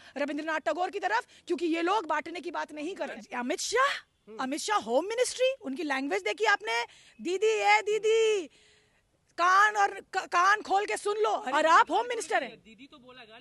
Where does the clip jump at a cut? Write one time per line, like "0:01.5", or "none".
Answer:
0:03.1
0:11.5